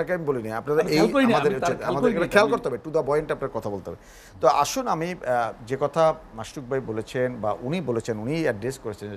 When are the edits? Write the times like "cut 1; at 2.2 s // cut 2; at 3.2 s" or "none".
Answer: none